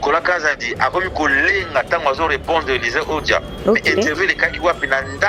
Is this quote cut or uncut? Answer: uncut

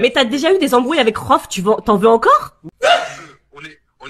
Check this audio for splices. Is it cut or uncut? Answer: cut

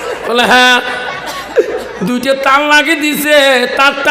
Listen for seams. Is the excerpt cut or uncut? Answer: uncut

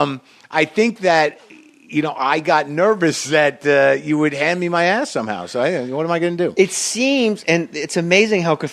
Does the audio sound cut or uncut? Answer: uncut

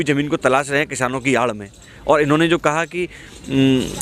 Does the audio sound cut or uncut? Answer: uncut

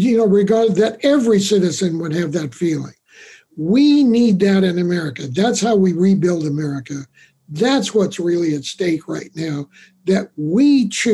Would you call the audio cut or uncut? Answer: uncut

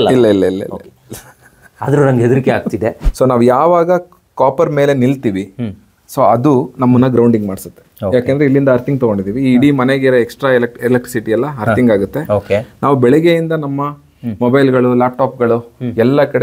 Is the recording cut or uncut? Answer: cut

